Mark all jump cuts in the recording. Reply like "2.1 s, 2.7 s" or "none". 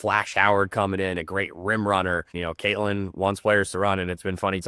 2.3 s